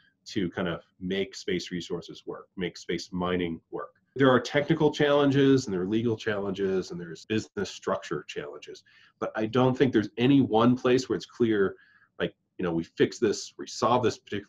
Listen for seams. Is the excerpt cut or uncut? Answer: cut